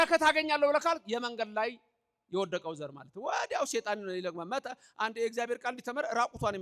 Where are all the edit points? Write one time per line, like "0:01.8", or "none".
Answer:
none